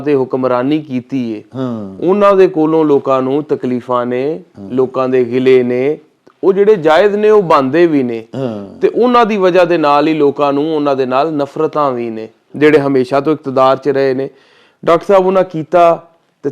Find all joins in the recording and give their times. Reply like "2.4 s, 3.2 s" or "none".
12.5 s